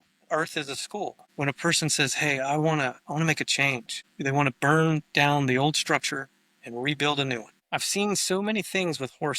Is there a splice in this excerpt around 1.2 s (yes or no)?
yes